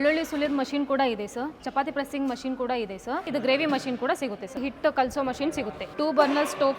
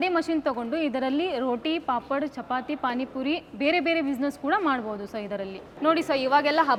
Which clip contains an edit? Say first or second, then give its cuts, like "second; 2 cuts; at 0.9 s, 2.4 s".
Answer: first; 3 cuts; at 3.3 s, 4.6 s, 5.8 s